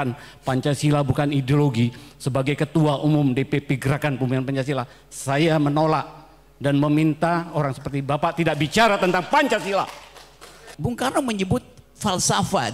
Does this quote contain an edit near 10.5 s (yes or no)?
yes